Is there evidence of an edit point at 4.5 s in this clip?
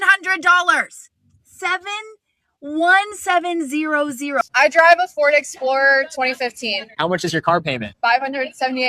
yes; 1 cut; at 4.5 s

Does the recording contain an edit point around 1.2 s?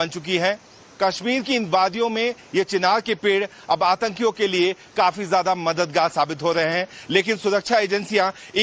no; 1 cut; at 7.6 s

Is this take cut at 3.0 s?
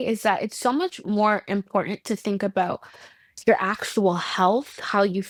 no; 0 cuts

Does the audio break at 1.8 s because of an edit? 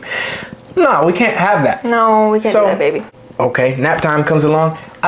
no; 1 cut; at 3.2 s

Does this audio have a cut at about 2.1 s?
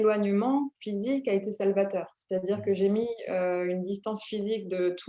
no; 0 cuts

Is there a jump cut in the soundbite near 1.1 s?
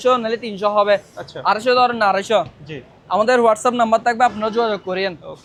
no; 0 cuts

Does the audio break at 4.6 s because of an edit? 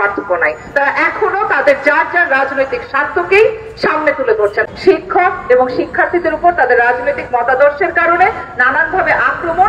yes; 1 cut; at 4.6 s

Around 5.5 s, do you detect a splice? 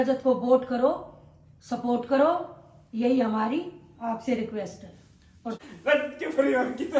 yes; 1 cut; at 5.5 s

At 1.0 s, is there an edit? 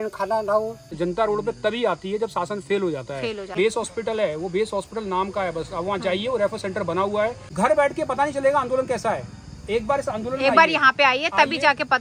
yes; 3 cuts; at 1.0 s, 3.5 s, 7.4 s

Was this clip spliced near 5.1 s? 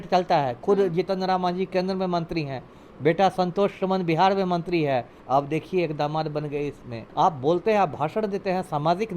yes; 2 cuts; at 5.1 s, 7.0 s

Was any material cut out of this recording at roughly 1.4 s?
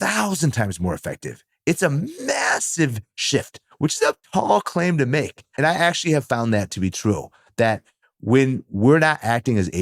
no; 1 cut; at 5.4 s

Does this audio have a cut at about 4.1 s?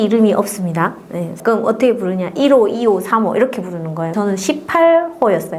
yes; 2 cuts; at 1.4 s, 4.1 s

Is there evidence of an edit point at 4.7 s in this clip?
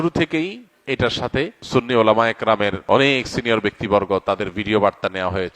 no; 2 cuts; at 1.6 s, 2.8 s

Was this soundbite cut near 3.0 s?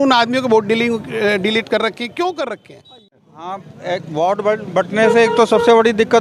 yes; 1 cut; at 3.0 s

